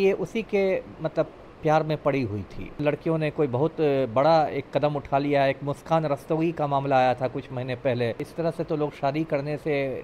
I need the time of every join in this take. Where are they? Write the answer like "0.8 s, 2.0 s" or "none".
2.8 s, 8.3 s